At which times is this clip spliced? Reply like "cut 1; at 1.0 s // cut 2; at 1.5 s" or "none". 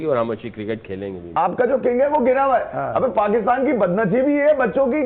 cut 1; at 1.3 s